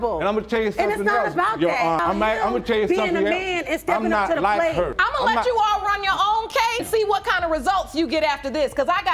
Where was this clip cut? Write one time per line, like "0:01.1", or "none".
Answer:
none